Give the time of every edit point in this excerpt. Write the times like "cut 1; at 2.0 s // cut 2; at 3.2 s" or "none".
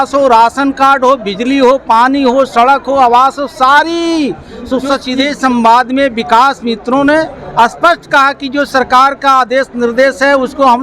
cut 1; at 5.1 s

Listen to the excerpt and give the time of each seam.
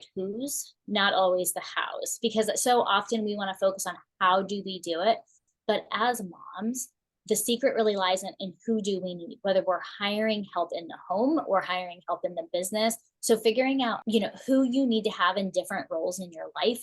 cut 1; at 13.1 s // cut 2; at 14.0 s

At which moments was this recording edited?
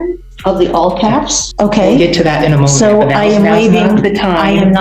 cut 1; at 1.5 s

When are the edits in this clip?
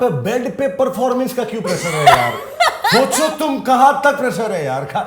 none

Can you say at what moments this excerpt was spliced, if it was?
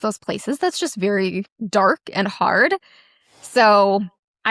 cut 1; at 1.5 s

